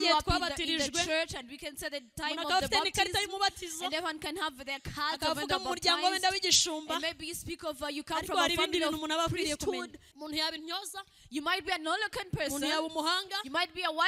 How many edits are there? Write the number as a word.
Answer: one